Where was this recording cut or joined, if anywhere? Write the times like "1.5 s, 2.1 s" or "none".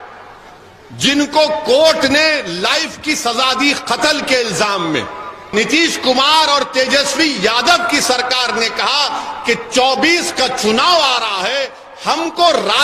5.5 s